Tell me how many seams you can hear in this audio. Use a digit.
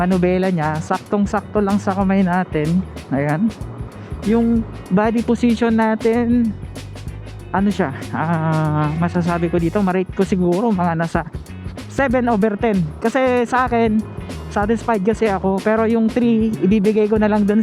0